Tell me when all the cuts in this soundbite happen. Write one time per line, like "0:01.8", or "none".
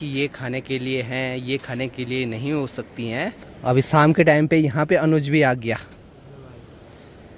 none